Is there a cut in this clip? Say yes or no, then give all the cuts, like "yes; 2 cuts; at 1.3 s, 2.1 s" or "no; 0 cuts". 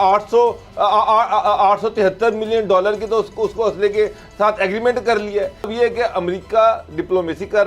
yes; 1 cut; at 5.7 s